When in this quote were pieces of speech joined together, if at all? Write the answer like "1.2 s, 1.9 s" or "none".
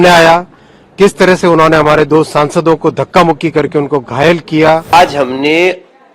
4.8 s